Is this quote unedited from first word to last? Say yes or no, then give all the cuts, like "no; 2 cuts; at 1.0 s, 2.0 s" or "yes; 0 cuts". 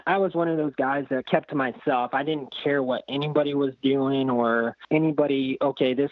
no; 2 cuts; at 1.2 s, 4.8 s